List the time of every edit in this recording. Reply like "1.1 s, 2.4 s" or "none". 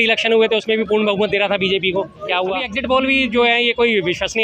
2.7 s